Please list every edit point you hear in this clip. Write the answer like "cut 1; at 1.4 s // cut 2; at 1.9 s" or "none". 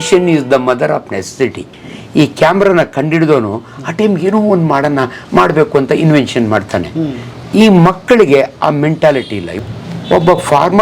cut 1; at 9.5 s